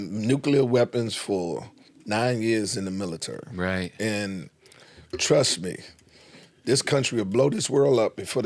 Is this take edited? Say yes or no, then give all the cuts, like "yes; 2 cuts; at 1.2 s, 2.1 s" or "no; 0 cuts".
no; 0 cuts